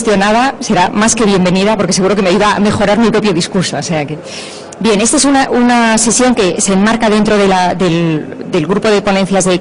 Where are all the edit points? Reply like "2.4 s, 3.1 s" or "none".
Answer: 6.4 s